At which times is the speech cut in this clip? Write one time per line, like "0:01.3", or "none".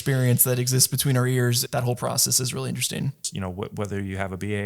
0:01.6
0:03.3